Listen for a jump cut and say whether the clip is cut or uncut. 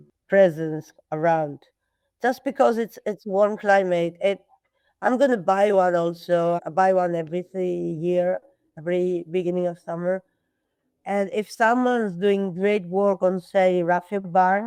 uncut